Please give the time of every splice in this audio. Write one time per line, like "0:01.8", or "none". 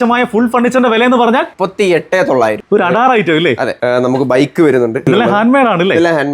0:01.5
0:02.6
0:03.7
0:05.0